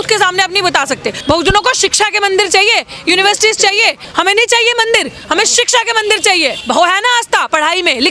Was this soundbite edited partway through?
yes; 3 cuts; at 1.2 s, 4.0 s, 6.6 s

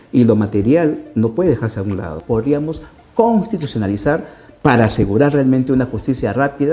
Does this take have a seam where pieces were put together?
yes; 1 cut; at 2.2 s

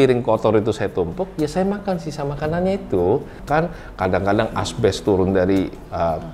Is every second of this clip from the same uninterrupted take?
no; 1 cut; at 3.4 s

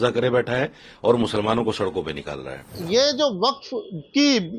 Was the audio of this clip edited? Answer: yes; 1 cut; at 2.8 s

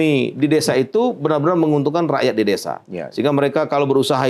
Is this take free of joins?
yes; 0 cuts

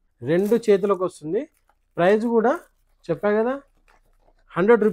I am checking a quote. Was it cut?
no; 0 cuts

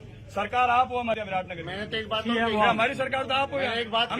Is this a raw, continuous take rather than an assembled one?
no; 1 cut; at 1.1 s

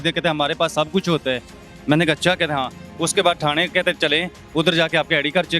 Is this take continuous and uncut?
yes; 0 cuts

